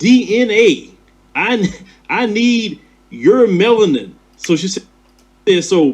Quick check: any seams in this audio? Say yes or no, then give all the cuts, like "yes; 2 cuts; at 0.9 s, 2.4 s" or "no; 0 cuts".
yes; 1 cut; at 4.7 s